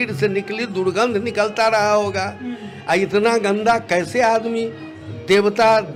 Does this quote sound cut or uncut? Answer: uncut